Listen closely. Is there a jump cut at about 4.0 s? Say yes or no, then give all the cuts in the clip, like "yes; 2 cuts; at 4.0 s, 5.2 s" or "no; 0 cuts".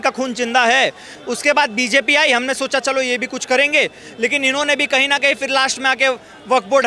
no; 1 cut; at 1.1 s